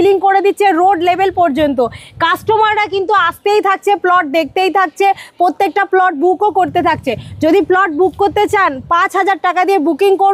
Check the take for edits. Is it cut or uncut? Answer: uncut